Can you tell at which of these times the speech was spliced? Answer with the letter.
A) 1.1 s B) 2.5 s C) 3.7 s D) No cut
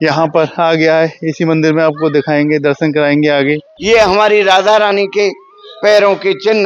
C